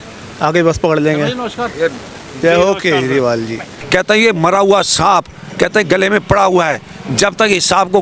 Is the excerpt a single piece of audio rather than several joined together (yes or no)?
no